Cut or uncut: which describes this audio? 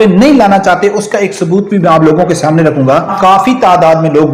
cut